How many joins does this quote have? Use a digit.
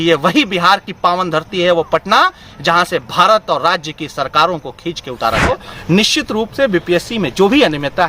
1